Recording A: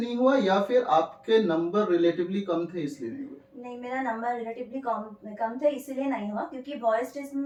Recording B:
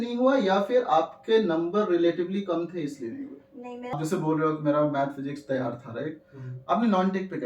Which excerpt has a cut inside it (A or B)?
B